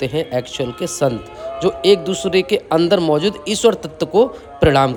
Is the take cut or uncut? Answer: uncut